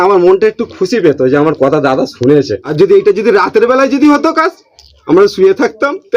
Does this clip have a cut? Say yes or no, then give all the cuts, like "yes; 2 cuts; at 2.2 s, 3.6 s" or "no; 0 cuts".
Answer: yes; 1 cut; at 2.6 s